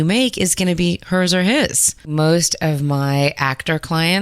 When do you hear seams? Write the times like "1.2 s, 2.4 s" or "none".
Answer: 2.1 s